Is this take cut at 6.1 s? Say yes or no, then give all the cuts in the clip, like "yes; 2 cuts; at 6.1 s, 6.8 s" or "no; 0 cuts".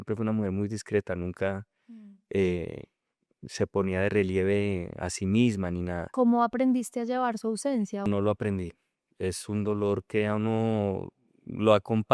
yes; 2 cuts; at 6.1 s, 8.1 s